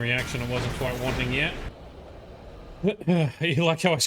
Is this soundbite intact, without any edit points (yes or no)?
no